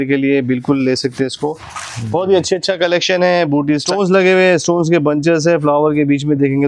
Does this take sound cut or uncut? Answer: cut